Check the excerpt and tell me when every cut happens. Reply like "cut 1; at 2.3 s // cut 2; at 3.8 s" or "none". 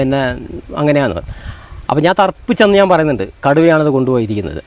none

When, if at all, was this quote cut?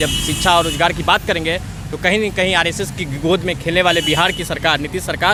none

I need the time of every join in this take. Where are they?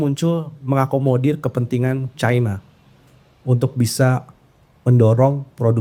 none

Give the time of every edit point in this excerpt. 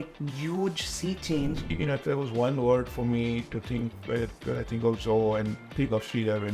cut 1; at 1.7 s // cut 2; at 5.6 s

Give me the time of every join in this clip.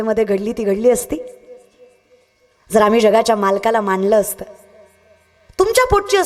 none

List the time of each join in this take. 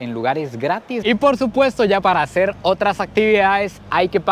cut 1; at 1.0 s // cut 2; at 2.0 s

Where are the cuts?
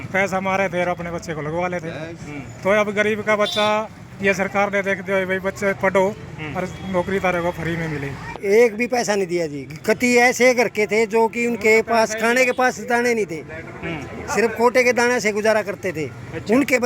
cut 1; at 8.3 s

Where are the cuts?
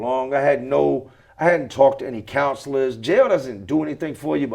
none

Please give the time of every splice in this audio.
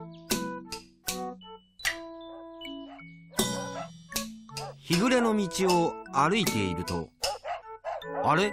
cut 1; at 1.8 s

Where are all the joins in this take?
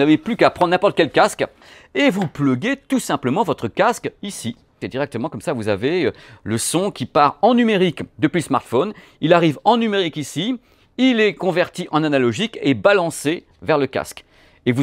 cut 1; at 1.7 s // cut 2; at 4.9 s

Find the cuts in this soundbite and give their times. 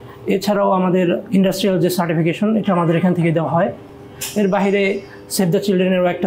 none

